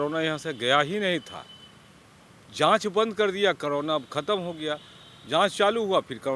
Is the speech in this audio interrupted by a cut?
no; 0 cuts

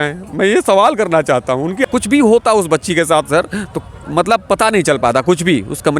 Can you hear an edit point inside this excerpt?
yes; 1 cut; at 1.9 s

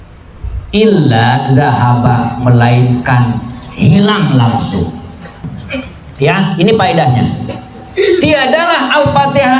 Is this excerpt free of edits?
no; 1 cut; at 5.6 s

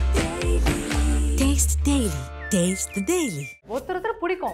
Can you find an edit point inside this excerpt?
yes; 1 cut; at 3.5 s

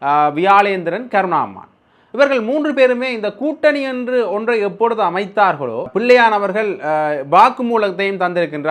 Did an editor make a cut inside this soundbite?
yes; 1 cut; at 5.9 s

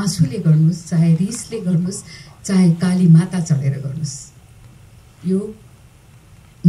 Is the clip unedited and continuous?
yes; 0 cuts

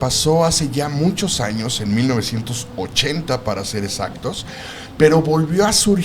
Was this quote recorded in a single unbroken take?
yes; 0 cuts

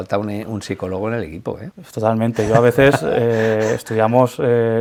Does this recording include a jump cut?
no; 0 cuts

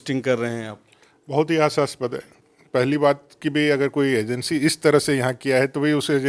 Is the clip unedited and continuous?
yes; 0 cuts

